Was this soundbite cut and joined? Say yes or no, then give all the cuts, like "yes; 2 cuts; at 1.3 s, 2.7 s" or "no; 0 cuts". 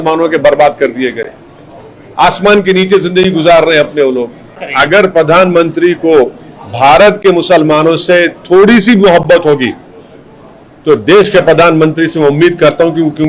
yes; 1 cut; at 4.6 s